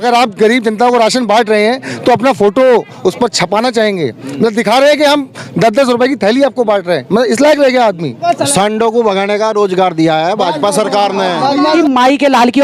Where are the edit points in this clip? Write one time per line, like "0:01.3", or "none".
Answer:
0:08.2
0:11.6